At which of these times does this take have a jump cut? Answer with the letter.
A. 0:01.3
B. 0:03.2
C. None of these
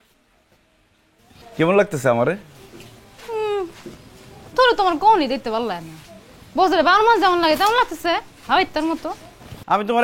A